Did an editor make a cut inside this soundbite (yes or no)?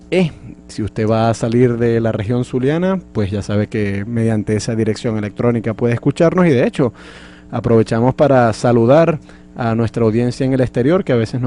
no